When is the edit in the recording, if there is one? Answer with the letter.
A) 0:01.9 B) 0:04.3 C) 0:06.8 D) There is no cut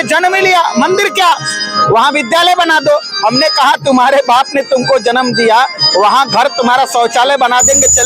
D